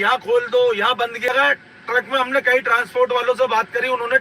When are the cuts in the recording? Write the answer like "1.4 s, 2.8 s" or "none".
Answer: 1.3 s